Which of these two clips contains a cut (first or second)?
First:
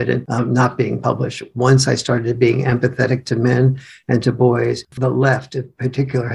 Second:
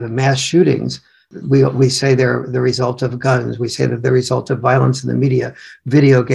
first